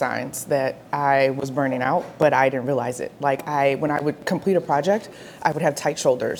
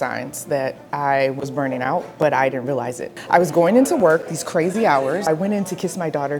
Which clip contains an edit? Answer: second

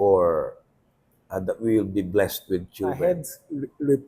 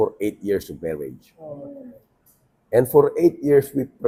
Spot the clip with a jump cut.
first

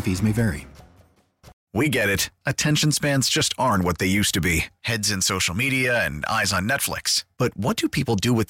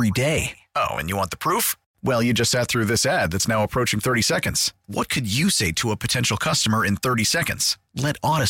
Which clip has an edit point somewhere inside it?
first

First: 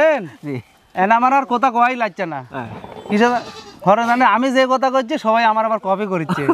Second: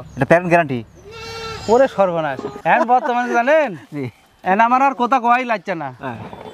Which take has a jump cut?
second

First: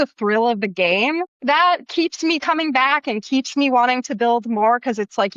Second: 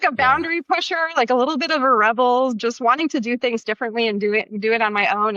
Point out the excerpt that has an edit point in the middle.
first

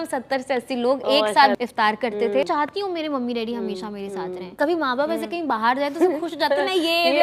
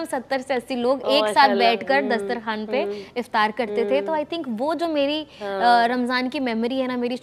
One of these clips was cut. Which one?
first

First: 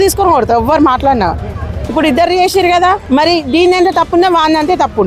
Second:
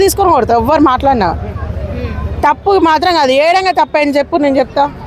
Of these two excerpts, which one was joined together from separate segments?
first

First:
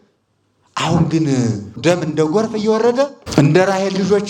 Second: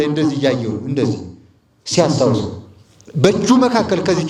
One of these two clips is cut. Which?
first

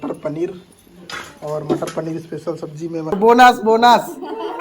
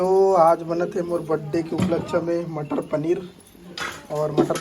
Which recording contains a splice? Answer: first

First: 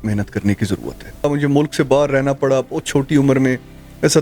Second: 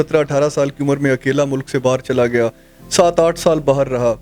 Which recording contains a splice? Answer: first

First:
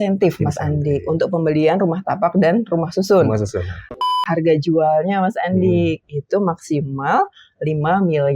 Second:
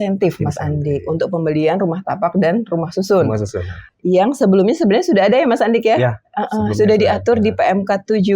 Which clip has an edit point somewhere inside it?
first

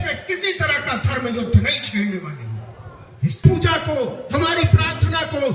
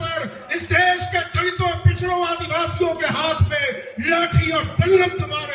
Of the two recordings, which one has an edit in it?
first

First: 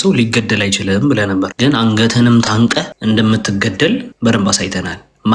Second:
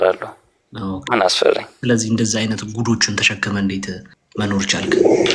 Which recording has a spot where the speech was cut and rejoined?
first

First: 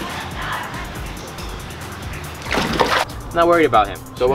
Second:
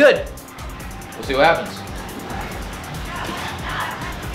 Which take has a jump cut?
first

